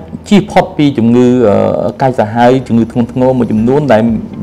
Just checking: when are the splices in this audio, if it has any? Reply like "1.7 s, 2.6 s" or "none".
none